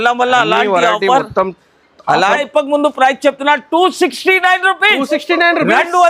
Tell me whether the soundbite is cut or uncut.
cut